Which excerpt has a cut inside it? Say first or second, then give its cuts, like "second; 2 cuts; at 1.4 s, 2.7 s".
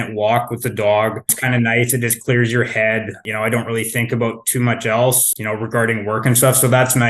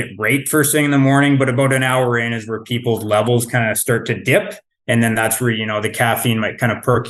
first; 3 cuts; at 1.4 s, 3.2 s, 5.2 s